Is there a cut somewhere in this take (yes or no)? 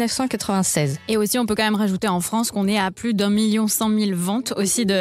yes